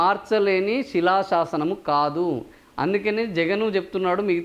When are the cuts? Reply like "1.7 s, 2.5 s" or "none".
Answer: none